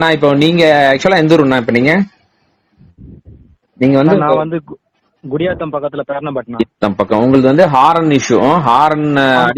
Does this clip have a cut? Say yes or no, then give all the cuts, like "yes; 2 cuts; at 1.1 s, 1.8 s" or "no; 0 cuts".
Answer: no; 0 cuts